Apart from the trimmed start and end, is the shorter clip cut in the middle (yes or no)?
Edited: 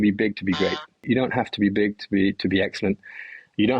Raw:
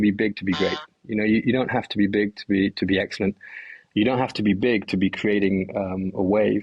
yes